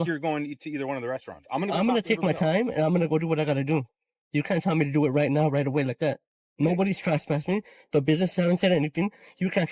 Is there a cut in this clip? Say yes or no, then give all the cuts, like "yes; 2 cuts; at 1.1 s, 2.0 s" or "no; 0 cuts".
no; 0 cuts